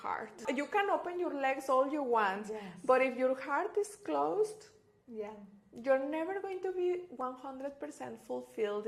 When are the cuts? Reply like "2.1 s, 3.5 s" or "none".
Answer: none